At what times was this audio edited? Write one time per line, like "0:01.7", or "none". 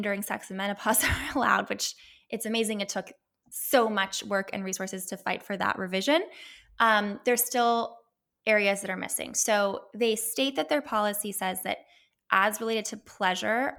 none